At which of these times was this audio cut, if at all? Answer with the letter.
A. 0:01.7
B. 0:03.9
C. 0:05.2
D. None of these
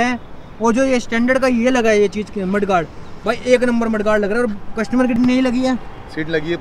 C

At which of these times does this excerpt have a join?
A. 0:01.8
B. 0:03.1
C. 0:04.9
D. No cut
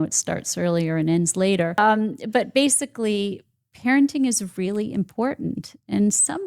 A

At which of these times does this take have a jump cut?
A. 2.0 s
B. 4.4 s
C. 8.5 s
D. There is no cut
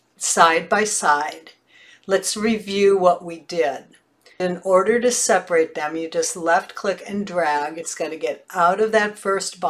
B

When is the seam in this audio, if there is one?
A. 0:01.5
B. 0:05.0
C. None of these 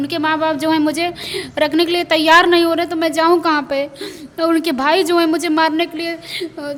C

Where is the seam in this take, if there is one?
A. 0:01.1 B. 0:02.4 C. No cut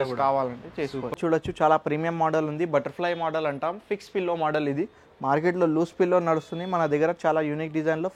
A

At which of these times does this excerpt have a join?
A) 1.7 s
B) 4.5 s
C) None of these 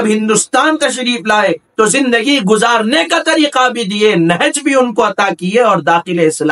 C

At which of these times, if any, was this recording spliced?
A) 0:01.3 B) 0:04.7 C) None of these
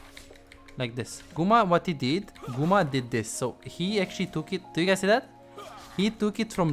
A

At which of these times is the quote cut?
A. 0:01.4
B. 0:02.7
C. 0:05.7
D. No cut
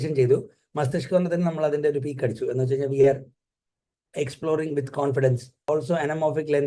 C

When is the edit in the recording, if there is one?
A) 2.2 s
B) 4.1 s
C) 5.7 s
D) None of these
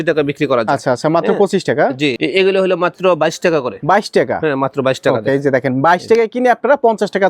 A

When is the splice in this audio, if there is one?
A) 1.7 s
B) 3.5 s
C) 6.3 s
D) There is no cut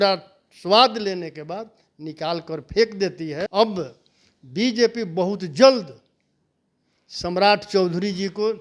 B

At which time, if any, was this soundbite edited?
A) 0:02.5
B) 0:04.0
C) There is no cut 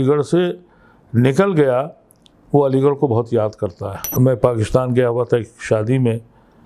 B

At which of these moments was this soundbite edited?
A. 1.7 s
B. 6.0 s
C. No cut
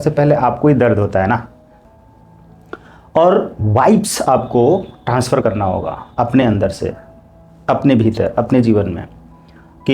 A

